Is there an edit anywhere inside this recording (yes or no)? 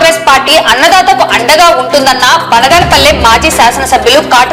no